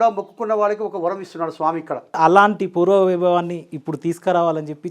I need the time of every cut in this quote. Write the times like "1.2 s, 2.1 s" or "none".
2.2 s